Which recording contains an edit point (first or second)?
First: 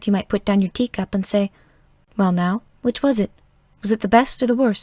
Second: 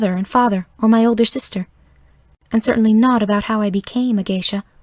first